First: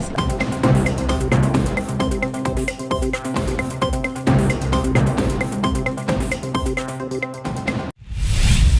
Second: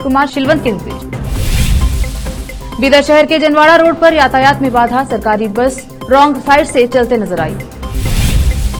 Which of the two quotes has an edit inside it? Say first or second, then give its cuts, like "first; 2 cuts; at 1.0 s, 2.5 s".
first; 1 cut; at 7.9 s